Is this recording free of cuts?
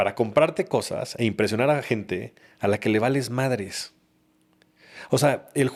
yes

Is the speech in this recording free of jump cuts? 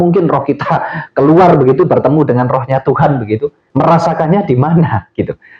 no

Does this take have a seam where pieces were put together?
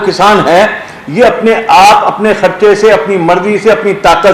no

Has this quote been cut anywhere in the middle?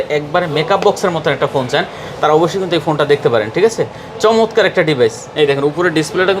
no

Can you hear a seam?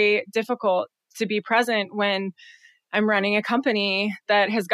no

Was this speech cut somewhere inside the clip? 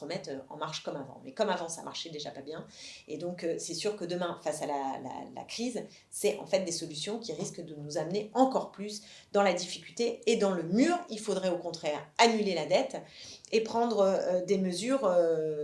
no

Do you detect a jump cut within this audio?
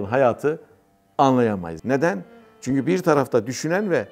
yes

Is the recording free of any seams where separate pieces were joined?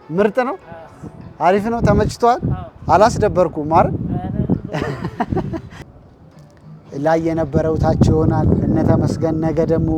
no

